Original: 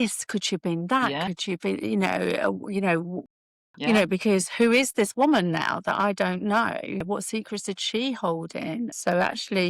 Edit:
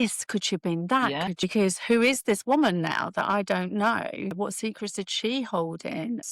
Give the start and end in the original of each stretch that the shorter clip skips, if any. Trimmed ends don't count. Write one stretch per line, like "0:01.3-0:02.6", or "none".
0:01.4-0:04.1